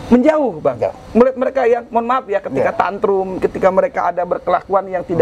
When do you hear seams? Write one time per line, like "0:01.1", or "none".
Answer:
none